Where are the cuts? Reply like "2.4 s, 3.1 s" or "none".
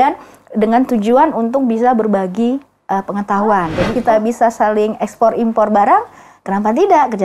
3.9 s

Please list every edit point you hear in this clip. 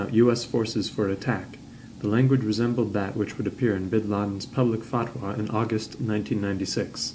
4.4 s

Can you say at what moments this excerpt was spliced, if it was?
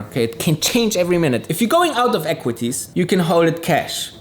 1.5 s

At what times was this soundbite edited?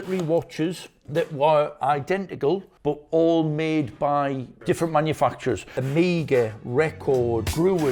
4.5 s

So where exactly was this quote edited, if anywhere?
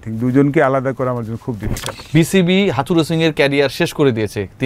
1.9 s

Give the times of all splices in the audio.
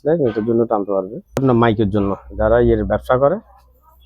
1.4 s

